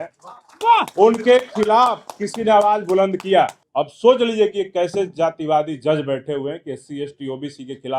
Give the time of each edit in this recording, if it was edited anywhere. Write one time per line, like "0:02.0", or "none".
0:03.6